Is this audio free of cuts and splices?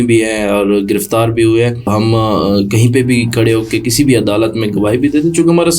no; 1 cut; at 1.9 s

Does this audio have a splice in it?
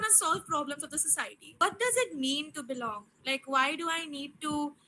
yes; 1 cut; at 1.4 s

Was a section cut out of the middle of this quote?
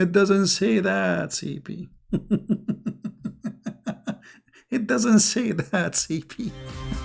no; 0 cuts

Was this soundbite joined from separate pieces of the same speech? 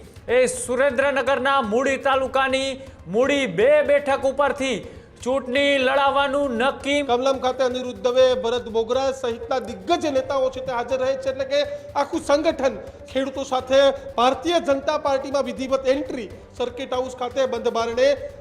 yes; 3 cuts; at 7.0 s, 13.0 s, 16.4 s

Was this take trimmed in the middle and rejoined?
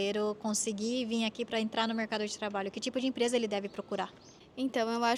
no; 0 cuts

